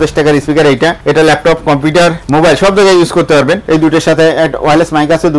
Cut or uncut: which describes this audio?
cut